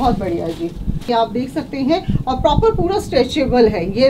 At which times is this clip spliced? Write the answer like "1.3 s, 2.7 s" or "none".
1.1 s